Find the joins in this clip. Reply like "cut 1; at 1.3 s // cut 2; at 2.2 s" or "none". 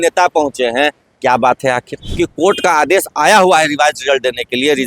cut 1; at 2.0 s